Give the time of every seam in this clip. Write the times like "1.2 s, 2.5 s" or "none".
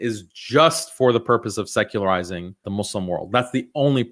2.6 s